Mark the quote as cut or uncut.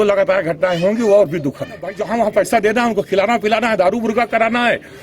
cut